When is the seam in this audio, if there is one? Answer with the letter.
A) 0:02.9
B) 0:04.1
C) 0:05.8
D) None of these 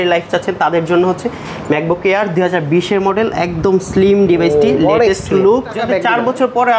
C